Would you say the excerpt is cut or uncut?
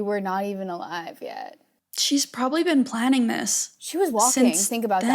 cut